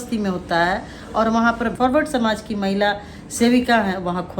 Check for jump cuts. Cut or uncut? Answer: cut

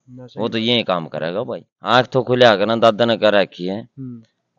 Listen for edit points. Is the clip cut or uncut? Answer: cut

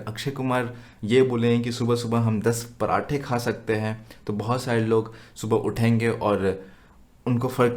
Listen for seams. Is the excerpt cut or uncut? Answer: uncut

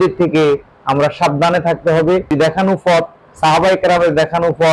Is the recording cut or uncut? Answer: cut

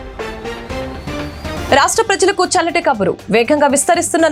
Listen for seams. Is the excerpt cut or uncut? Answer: uncut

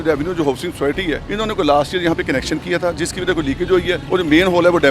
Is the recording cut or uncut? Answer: cut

